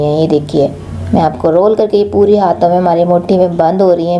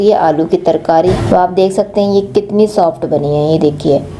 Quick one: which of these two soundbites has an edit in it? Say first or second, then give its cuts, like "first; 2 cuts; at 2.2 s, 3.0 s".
second; 1 cut; at 1.2 s